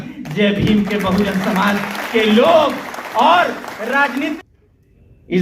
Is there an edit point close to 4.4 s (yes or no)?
yes